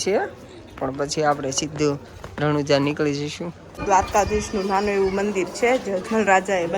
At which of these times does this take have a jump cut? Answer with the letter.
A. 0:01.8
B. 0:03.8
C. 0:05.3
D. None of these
B